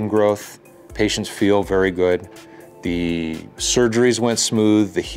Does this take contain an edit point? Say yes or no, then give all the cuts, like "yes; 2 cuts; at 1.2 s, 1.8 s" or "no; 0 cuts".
no; 0 cuts